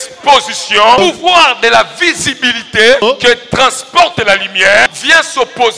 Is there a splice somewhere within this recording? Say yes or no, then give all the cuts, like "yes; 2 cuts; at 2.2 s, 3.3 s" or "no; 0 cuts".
yes; 3 cuts; at 1.0 s, 3.0 s, 5.0 s